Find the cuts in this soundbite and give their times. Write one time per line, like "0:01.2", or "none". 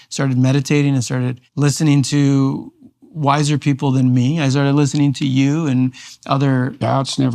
0:01.4